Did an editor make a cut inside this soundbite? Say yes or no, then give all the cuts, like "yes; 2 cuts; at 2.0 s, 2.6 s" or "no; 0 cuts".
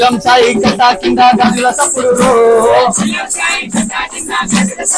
no; 0 cuts